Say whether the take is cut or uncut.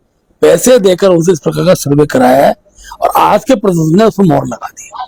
uncut